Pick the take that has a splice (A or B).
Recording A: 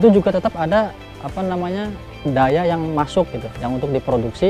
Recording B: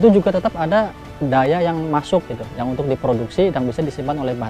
B